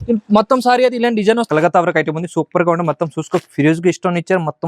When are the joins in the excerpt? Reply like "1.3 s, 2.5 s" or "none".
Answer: 1.4 s